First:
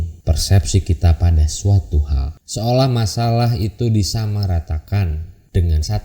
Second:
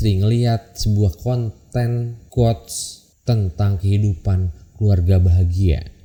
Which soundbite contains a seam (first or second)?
first